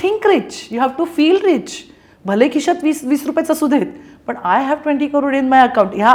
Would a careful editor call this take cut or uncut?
uncut